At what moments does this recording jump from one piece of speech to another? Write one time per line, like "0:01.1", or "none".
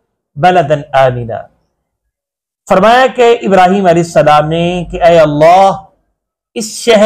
none